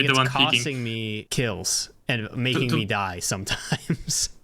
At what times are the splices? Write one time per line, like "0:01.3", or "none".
0:01.3